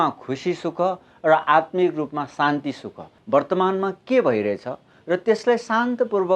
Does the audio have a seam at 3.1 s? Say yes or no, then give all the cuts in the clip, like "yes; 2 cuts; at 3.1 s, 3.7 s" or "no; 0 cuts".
yes; 1 cut; at 3.1 s